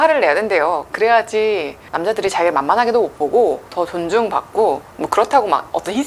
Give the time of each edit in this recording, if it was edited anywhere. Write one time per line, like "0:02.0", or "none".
none